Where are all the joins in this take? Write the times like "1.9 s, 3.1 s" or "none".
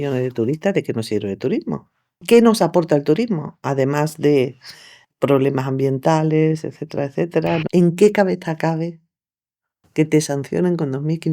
7.7 s